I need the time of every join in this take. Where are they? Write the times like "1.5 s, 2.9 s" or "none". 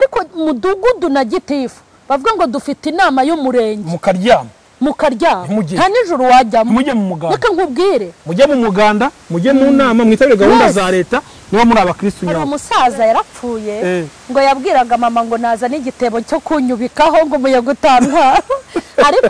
12.5 s